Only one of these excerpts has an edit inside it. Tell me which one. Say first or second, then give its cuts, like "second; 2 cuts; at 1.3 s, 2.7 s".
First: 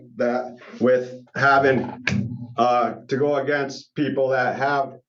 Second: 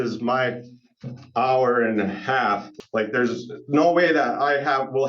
second; 1 cut; at 2.7 s